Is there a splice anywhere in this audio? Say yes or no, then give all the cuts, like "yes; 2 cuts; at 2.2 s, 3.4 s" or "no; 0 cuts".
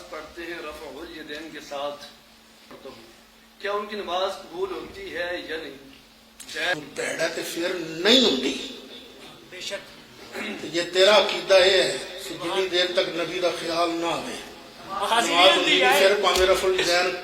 yes; 2 cuts; at 2.7 s, 6.7 s